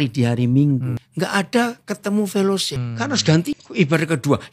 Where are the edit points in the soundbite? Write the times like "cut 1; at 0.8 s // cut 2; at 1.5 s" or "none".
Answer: cut 1; at 1.0 s // cut 2; at 2.8 s // cut 3; at 3.6 s